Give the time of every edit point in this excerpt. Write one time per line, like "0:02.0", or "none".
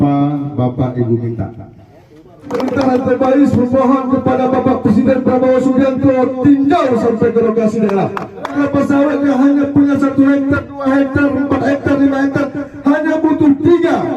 0:02.5
0:08.5